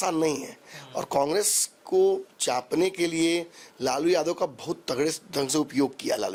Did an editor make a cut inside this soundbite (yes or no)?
no